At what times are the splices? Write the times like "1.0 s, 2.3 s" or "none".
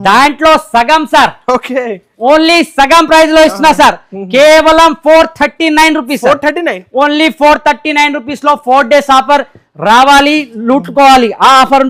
none